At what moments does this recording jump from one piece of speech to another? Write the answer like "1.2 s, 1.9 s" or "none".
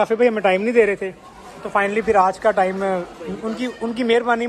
none